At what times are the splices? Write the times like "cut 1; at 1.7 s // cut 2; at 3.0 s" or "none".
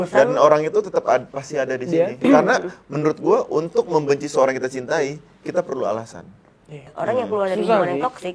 cut 1; at 6.9 s